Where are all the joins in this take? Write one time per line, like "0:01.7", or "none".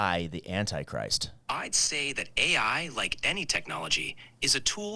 0:01.3